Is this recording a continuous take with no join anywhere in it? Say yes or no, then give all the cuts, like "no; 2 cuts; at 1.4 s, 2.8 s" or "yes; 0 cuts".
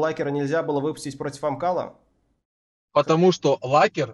yes; 0 cuts